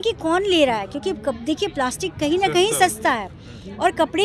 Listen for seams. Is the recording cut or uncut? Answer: uncut